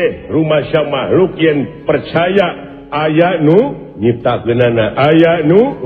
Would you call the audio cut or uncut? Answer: uncut